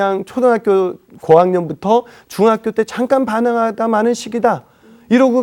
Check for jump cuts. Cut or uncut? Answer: uncut